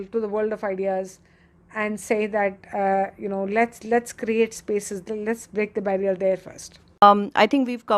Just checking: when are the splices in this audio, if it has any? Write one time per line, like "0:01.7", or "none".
0:07.0